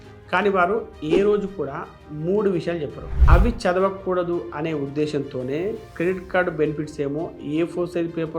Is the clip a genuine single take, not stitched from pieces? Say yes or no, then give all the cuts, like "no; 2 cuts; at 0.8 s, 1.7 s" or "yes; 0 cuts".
no; 1 cut; at 3.1 s